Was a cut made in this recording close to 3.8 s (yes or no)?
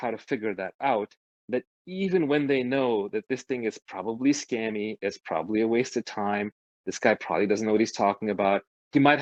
no